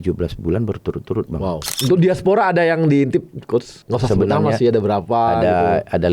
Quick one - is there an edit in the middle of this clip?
yes; 2 cuts; at 1.7 s, 3.8 s

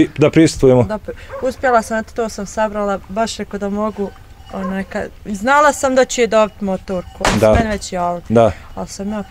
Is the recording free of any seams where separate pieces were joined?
yes; 0 cuts

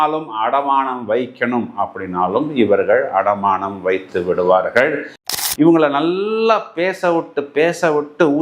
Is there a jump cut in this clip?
yes; 1 cut; at 5.3 s

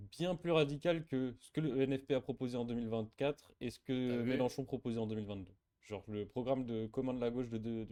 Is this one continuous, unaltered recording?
yes; 0 cuts

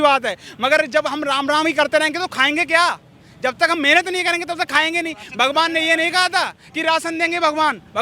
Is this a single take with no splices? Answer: yes; 0 cuts

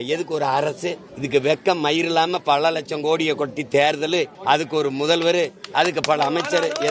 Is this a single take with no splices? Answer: no; 2 cuts; at 1.1 s, 4.3 s

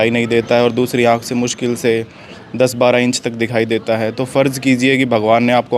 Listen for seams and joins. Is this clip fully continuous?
yes; 0 cuts

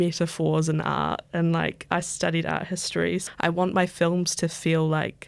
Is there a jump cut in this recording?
yes; 1 cut; at 3.2 s

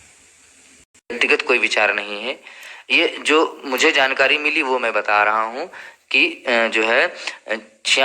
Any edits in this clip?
yes; 1 cut; at 1.2 s

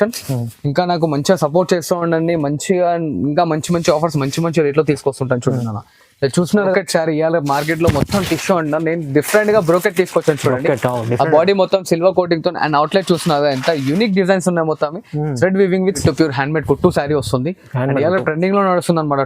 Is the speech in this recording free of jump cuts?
no; 2 cuts; at 6.7 s, 16.0 s

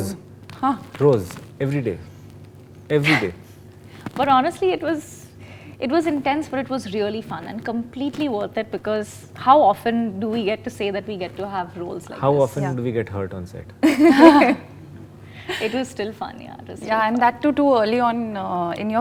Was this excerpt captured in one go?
yes; 0 cuts

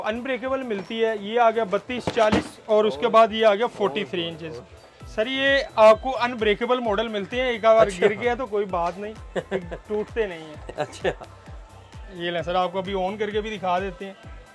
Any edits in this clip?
no; 0 cuts

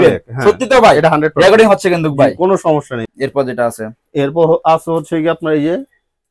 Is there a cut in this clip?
yes; 1 cut; at 3.0 s

